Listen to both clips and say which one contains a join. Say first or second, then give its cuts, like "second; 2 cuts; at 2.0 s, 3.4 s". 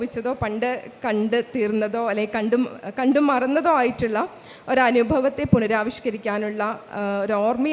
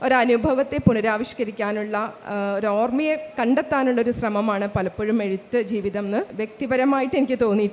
second; 1 cut; at 6.4 s